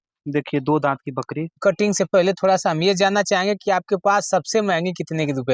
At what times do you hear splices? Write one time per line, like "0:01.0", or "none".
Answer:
0:01.5